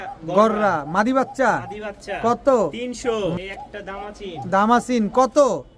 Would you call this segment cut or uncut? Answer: cut